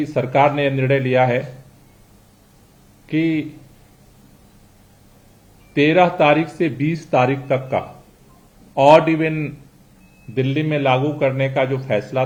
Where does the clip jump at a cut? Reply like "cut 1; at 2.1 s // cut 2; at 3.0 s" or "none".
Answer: none